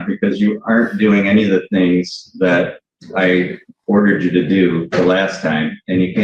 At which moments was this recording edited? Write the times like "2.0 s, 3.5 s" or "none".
none